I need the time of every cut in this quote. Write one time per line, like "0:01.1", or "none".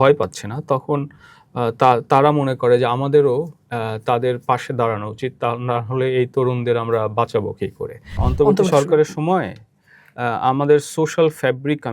0:08.2